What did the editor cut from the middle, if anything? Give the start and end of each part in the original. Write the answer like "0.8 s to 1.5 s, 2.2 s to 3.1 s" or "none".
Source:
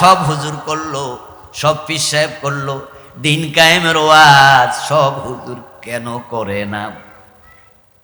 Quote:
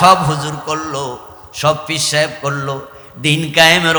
none